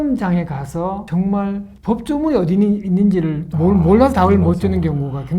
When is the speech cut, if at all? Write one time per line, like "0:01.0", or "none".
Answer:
0:01.0
0:01.7